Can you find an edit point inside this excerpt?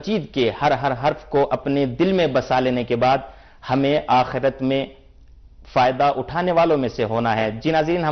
no; 0 cuts

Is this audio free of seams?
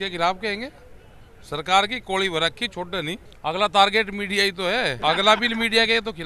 no; 2 cuts; at 3.3 s, 5.0 s

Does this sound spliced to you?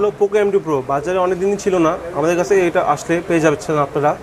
no; 0 cuts

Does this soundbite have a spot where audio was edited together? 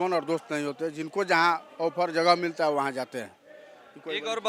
no; 0 cuts

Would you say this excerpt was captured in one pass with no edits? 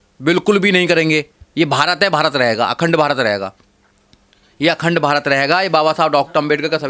yes; 0 cuts

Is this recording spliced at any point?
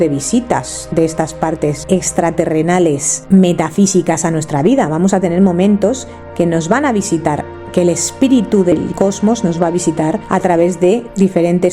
yes; 2 cuts; at 1.8 s, 3.1 s

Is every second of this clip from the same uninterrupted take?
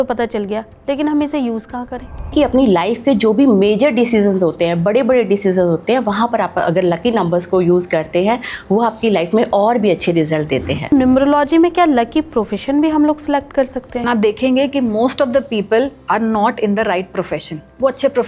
no; 3 cuts; at 2.3 s, 10.9 s, 13.9 s

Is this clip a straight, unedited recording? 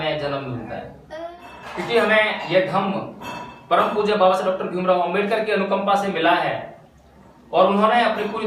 no; 1 cut; at 1.2 s

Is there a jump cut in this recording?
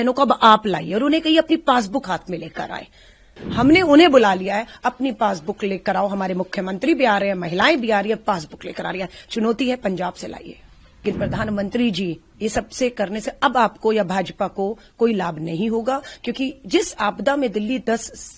yes; 2 cuts; at 3.4 s, 10.8 s

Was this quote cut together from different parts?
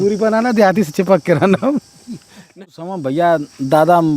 yes; 1 cut; at 2.5 s

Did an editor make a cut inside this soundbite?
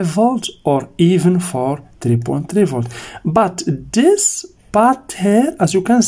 no; 0 cuts

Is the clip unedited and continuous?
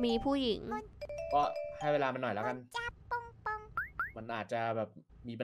no; 1 cut; at 0.9 s

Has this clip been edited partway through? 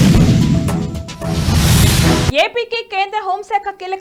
no; 0 cuts

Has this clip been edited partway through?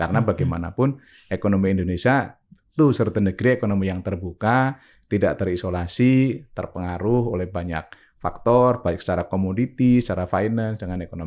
no; 0 cuts

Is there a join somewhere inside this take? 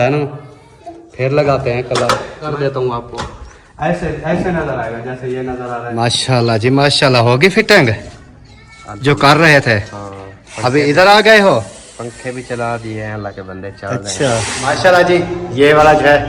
yes; 3 cuts; at 2.4 s, 5.8 s, 14.5 s

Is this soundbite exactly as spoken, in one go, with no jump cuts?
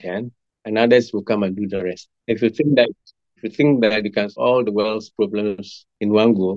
no; 1 cut; at 2.1 s

